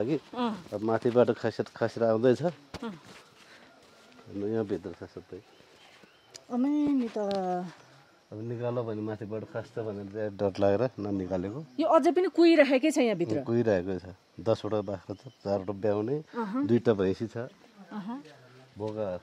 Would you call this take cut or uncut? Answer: uncut